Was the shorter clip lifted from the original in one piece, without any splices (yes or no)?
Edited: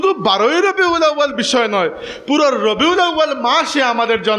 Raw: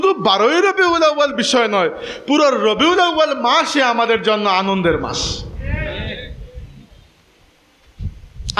yes